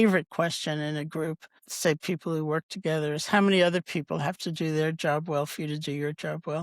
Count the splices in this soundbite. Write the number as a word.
one